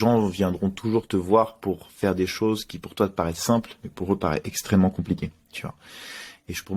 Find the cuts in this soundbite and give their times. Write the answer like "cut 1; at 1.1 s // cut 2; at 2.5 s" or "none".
none